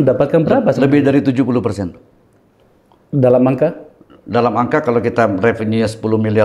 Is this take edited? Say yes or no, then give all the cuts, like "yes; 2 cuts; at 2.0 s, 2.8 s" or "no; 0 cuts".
no; 0 cuts